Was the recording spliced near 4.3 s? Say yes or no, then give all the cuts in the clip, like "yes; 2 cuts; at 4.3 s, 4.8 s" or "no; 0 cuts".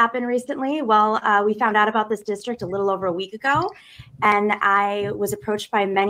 yes; 1 cut; at 4.3 s